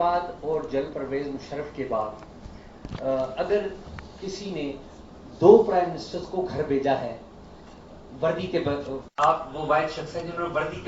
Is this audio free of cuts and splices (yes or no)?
no